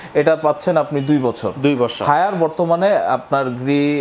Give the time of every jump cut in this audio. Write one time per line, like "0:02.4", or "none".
none